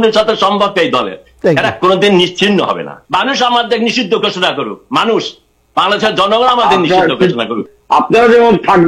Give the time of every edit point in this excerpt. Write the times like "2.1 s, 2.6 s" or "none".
2.9 s, 7.7 s